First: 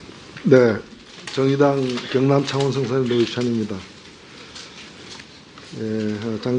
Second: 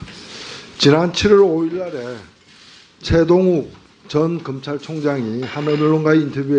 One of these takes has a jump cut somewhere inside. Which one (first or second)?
second